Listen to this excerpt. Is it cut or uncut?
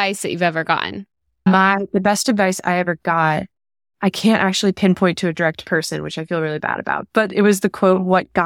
uncut